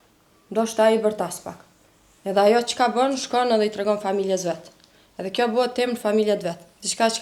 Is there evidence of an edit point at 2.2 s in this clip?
no; 0 cuts

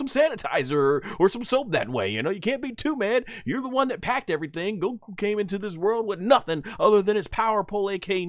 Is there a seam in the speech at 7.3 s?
yes; 1 cut; at 7.3 s

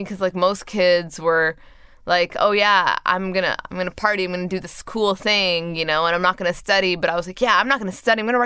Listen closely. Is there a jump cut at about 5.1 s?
no; 0 cuts

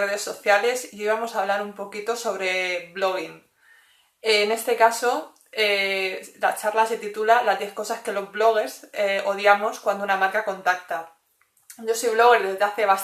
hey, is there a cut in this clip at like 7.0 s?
yes; 1 cut; at 7.0 s

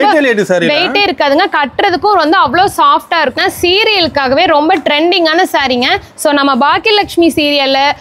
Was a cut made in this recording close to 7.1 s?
no; 1 cut; at 3.4 s

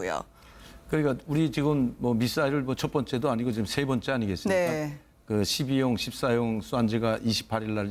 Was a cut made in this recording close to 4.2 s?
no; 1 cut; at 5.9 s

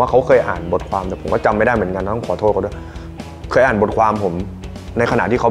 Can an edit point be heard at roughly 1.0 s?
no; 0 cuts

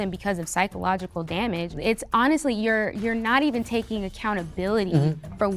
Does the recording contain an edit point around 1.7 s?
yes; 1 cut; at 1.7 s

